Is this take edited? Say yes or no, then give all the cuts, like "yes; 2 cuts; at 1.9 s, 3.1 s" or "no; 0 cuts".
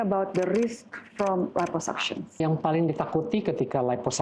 yes; 1 cut; at 2.4 s